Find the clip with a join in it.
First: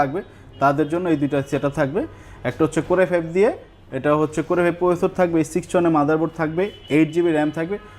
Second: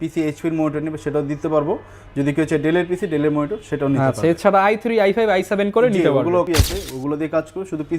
second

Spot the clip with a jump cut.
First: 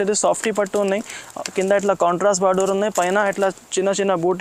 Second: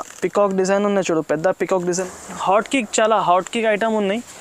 second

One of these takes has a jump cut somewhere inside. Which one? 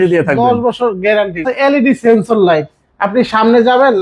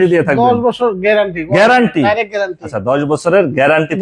first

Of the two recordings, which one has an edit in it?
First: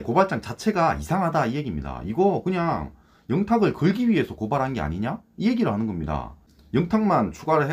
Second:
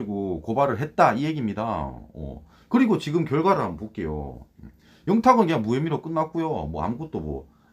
first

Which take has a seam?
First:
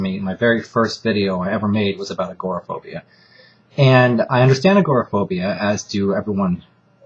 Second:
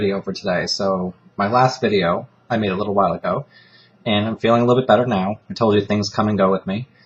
first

